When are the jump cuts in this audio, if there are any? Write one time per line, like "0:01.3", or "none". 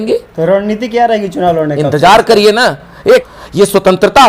0:03.2